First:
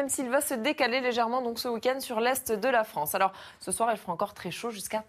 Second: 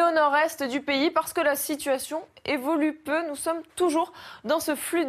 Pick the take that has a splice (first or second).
first